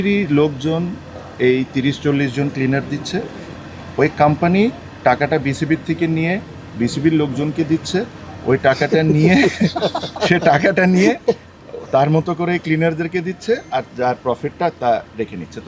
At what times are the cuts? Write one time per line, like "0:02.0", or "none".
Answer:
none